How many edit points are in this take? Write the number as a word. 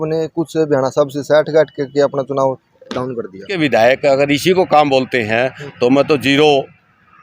one